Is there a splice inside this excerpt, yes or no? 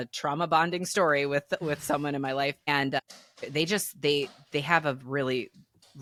no